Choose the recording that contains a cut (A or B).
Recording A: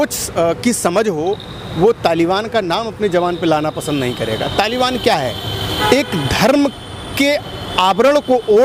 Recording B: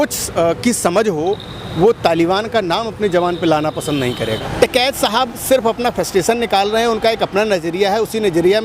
B